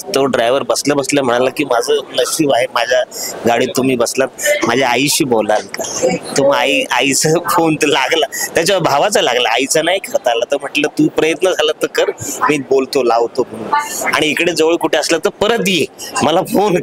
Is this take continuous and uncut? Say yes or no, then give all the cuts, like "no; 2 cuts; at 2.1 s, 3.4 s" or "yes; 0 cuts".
yes; 0 cuts